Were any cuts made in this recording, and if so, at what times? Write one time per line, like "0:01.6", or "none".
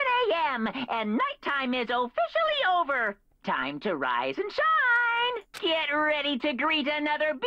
0:05.5